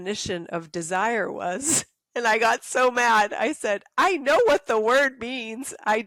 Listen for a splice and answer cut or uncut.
uncut